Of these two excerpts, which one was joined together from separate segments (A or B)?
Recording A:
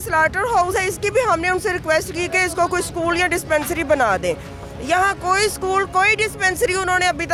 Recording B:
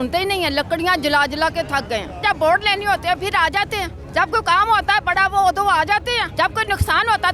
B